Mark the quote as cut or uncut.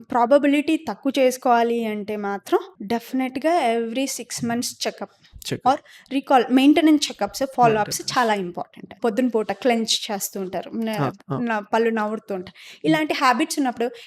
cut